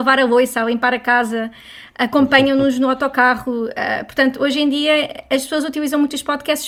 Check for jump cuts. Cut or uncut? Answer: uncut